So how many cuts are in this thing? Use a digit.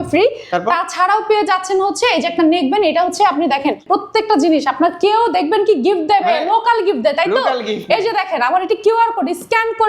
1